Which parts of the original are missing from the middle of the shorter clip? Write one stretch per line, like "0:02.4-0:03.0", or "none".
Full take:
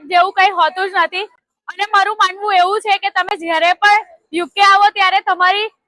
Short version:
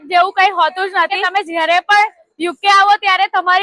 0:01.2-0:03.1